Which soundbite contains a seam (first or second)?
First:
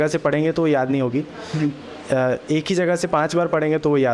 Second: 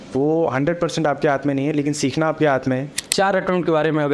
second